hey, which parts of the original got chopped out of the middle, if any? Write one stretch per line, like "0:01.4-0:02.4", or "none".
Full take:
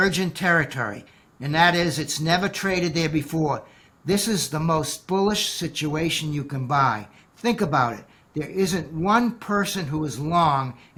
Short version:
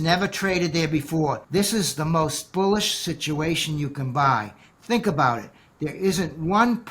0:03.6-0:04.0